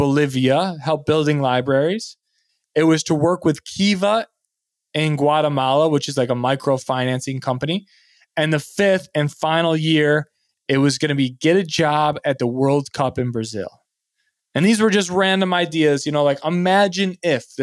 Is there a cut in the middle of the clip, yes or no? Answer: no